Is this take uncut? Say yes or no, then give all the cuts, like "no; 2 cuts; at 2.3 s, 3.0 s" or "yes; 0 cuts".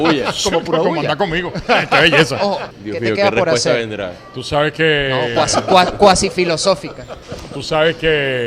no; 1 cut; at 2.7 s